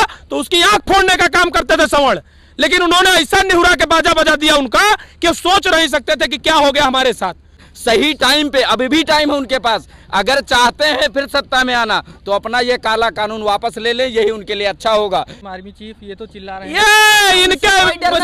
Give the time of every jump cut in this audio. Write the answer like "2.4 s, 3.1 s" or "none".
7.6 s, 15.4 s